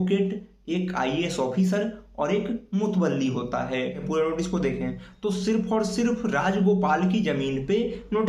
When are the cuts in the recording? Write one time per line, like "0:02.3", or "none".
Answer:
0:04.0